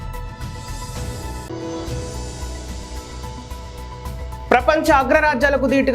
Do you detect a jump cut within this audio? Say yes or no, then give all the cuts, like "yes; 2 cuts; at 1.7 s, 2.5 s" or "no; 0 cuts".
yes; 2 cuts; at 1.5 s, 4.2 s